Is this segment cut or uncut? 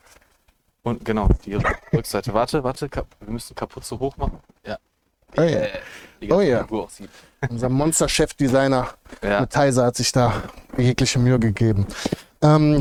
uncut